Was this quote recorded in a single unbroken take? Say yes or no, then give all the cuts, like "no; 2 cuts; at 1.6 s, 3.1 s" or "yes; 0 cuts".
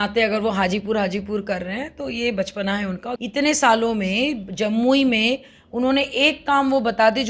no; 1 cut; at 3.1 s